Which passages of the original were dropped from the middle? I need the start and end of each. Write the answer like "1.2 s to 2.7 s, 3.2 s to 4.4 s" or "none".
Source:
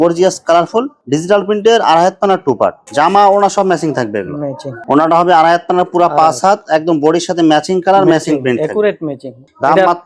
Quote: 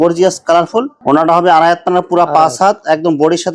0.9 s to 4.8 s